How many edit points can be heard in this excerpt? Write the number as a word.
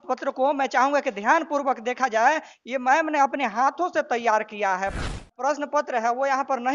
one